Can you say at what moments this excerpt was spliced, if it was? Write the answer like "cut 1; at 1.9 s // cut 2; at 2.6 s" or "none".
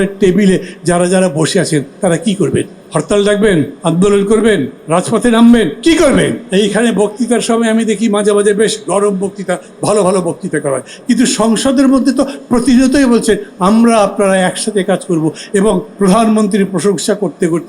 cut 1; at 2.8 s // cut 2; at 3.7 s // cut 3; at 4.8 s // cut 4; at 6.4 s